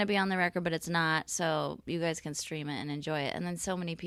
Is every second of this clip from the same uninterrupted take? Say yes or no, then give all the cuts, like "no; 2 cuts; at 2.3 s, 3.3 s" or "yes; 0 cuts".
yes; 0 cuts